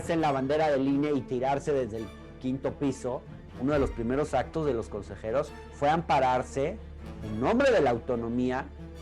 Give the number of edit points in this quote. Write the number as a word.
one